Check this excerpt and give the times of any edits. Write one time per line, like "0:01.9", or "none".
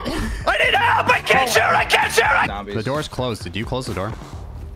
0:02.5